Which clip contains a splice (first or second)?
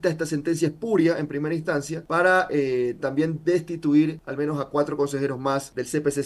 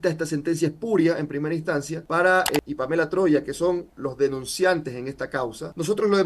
second